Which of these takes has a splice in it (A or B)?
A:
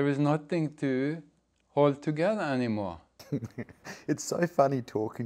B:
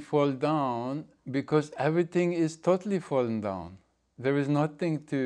A